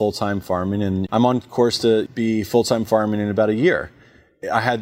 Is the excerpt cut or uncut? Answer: cut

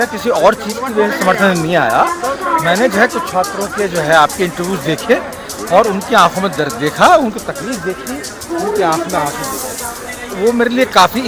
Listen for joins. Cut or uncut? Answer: uncut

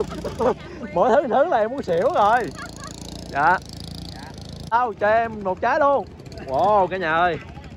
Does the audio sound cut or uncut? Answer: cut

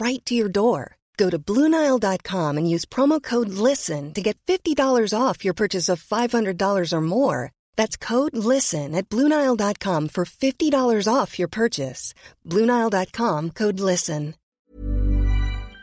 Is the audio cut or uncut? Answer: cut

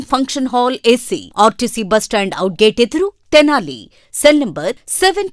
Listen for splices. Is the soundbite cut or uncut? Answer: uncut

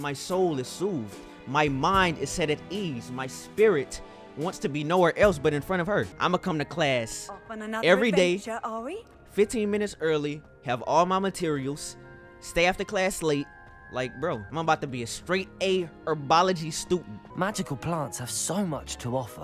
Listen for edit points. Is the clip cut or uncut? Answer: cut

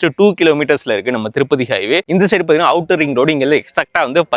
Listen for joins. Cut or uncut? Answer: uncut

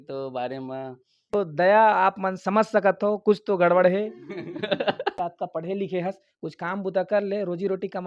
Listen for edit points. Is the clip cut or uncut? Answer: cut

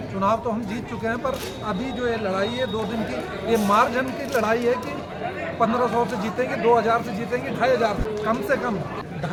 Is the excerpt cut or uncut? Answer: uncut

